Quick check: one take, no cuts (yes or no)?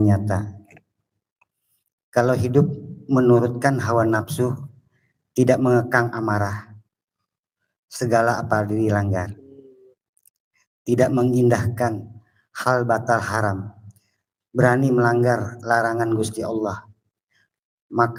yes